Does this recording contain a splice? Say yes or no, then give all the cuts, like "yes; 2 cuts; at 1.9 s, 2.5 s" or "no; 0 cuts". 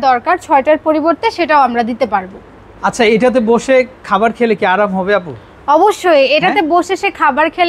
no; 0 cuts